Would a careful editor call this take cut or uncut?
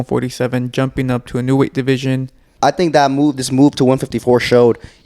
cut